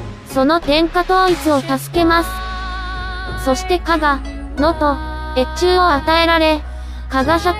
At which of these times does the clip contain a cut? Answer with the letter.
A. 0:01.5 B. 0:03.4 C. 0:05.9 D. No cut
A